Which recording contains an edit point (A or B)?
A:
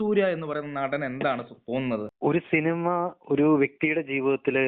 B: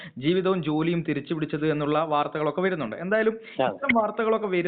A